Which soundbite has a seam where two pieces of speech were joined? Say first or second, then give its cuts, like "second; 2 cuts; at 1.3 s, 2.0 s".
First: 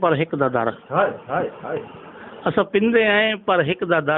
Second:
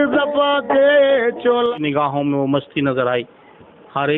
second; 1 cut; at 1.7 s